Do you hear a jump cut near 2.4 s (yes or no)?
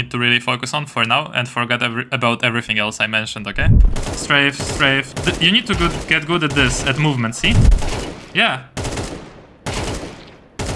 no